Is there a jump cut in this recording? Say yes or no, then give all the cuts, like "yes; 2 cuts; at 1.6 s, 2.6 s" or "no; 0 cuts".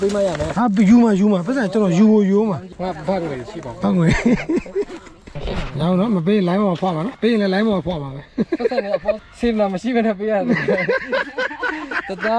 yes; 3 cuts; at 2.7 s, 7.1 s, 9.2 s